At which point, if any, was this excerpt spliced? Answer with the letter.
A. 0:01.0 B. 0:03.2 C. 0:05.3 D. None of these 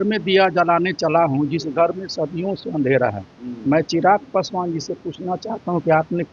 D